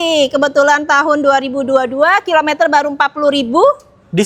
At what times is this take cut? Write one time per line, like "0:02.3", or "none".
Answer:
none